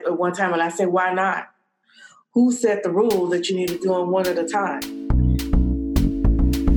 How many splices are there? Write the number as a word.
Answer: one